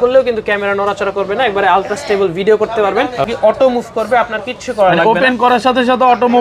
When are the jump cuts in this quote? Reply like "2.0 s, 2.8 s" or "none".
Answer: 3.3 s

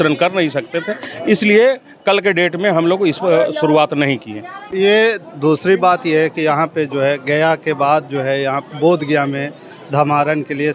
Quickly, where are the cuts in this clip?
none

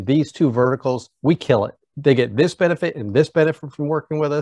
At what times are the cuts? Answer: 1.8 s

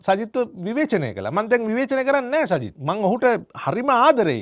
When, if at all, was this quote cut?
2.7 s

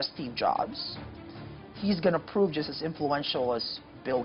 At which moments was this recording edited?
none

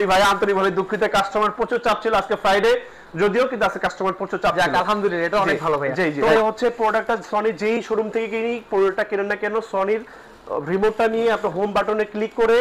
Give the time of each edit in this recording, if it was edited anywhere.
none

